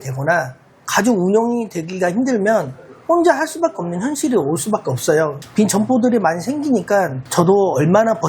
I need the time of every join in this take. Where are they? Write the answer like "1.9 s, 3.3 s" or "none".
5.4 s